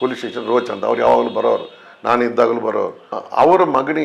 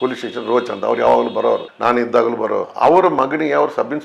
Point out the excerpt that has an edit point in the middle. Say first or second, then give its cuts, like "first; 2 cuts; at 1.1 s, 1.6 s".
second; 2 cuts; at 1.7 s, 2.7 s